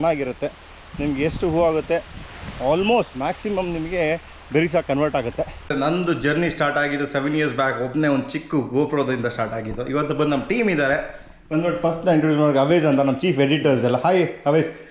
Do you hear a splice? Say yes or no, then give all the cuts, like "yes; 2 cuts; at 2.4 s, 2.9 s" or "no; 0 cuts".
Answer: yes; 1 cut; at 5.7 s